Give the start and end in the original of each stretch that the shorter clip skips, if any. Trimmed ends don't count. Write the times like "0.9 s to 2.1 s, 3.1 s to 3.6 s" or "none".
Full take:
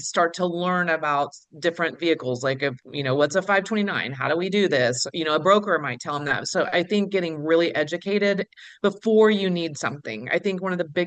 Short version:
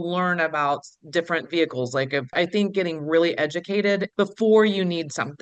2.8 s to 6.7 s, 8.4 s to 8.7 s

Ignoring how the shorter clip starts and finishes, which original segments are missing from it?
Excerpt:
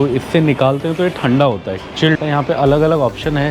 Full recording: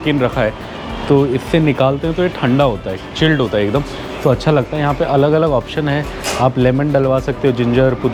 3.4 s to 4.7 s

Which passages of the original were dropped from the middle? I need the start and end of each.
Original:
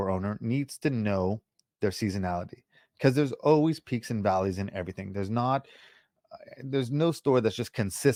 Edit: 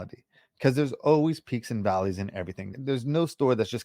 5.0 s to 6.5 s

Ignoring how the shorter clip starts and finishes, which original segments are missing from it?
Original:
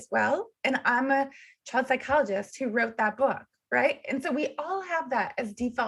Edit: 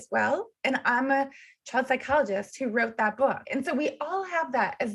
3.4 s to 4.0 s

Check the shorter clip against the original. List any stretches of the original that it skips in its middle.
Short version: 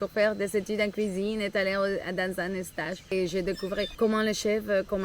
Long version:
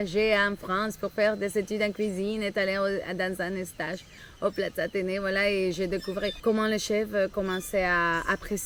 4.1 s to 5.6 s

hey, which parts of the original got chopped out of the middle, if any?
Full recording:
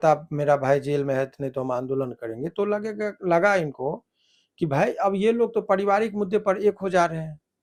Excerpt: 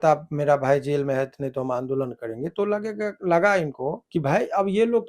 4.0 s to 4.5 s

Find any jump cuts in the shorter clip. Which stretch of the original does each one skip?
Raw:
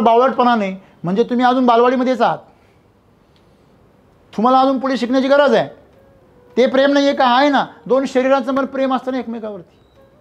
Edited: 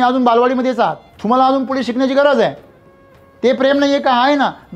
2.5 s to 4.2 s

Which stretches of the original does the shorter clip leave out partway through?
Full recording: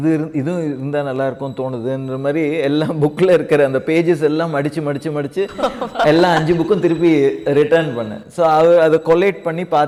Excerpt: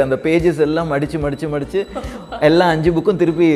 none

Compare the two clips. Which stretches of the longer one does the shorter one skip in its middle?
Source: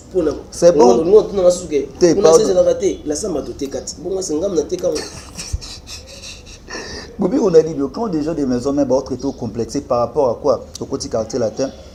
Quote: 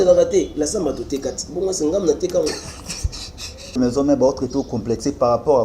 6.3 s to 8.5 s

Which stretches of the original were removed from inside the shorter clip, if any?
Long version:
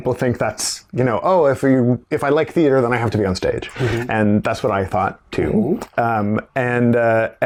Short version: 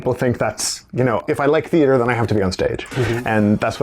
1.2 s to 2.0 s

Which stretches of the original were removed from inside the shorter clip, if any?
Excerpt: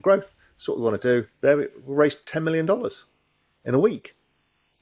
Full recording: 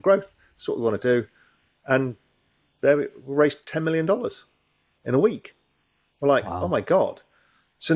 1.3 s to 2.7 s

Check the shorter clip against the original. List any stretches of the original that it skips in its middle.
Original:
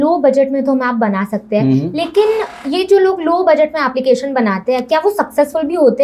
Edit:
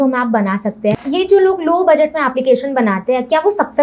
1.6 s to 2.5 s

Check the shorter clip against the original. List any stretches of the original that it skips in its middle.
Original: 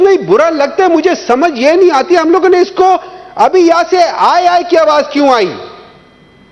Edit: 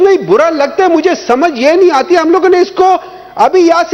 none

